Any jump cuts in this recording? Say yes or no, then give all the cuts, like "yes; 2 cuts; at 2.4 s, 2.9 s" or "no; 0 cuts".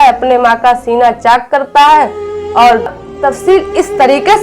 yes; 1 cut; at 2.9 s